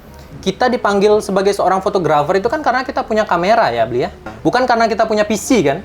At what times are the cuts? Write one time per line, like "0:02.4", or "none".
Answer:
0:04.3

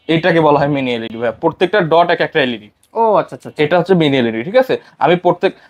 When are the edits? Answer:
none

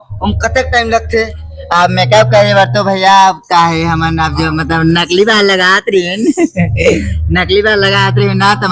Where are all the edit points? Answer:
none

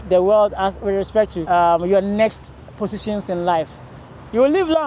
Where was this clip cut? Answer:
0:01.4

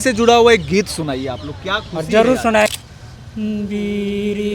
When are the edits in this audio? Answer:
0:02.7

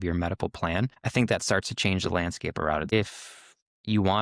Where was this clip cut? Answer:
0:01.0
0:02.9

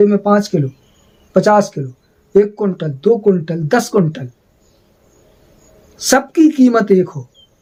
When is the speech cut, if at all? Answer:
none

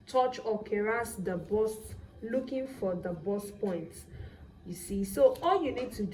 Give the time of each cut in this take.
none

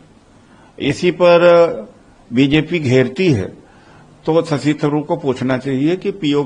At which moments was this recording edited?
none

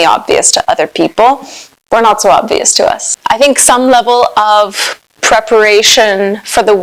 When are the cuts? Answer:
0:03.1

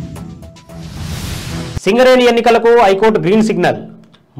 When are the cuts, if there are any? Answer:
0:01.8

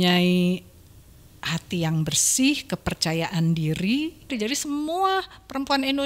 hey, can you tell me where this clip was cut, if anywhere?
0:04.3

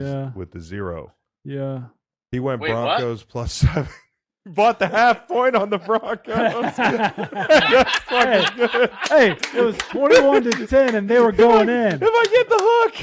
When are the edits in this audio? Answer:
none

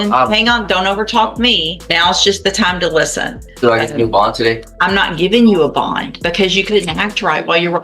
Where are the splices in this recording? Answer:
0:01.8
0:03.4
0:04.7
0:06.1

